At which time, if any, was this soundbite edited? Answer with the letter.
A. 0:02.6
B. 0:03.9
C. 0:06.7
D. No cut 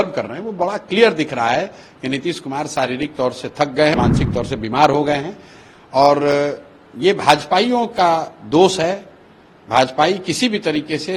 B